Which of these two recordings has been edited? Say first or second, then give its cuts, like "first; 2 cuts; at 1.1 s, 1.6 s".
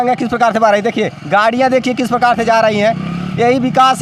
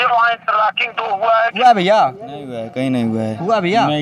second; 1 cut; at 1.6 s